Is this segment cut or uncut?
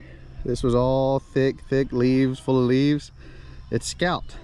uncut